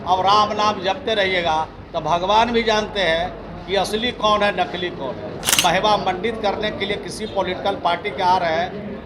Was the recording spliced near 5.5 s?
yes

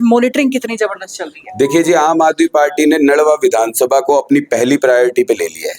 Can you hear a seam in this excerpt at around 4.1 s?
no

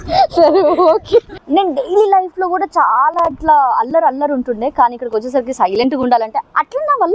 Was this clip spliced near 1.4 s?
yes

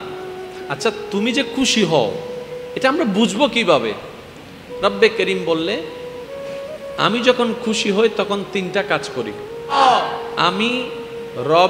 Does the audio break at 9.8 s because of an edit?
yes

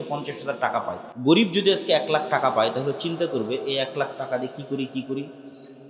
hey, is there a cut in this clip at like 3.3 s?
no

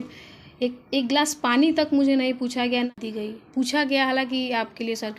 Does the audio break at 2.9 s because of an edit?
yes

